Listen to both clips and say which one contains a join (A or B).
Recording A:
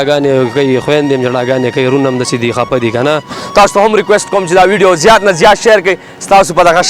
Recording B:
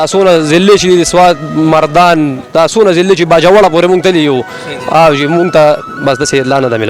A